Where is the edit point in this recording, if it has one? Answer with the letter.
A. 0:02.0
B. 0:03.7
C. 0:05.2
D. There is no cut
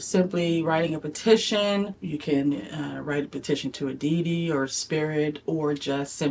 A